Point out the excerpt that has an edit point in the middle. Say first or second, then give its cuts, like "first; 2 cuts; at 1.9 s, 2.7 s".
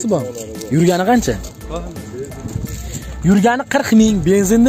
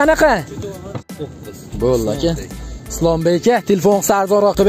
second; 1 cut; at 1.1 s